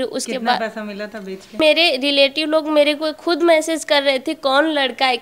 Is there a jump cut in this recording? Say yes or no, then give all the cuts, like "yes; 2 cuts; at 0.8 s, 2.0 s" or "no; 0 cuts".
yes; 1 cut; at 1.6 s